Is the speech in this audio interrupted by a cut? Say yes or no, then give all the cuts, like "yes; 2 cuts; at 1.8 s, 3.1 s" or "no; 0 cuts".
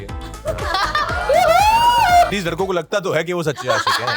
yes; 1 cut; at 2.3 s